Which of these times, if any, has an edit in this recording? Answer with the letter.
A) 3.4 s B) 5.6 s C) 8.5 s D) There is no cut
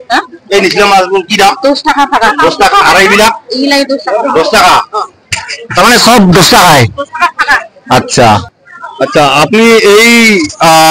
C